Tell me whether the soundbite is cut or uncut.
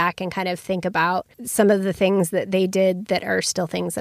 cut